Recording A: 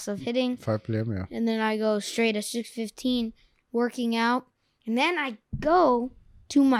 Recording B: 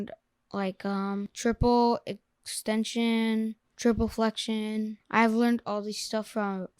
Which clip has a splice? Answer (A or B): B